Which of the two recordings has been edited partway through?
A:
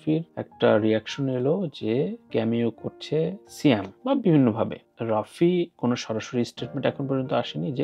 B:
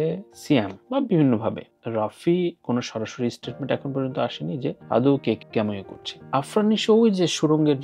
B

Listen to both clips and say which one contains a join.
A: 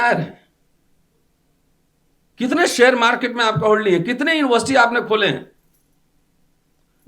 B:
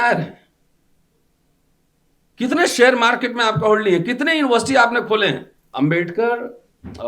B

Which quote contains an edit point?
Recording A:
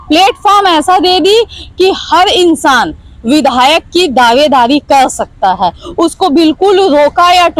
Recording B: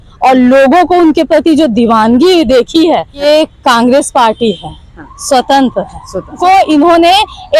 B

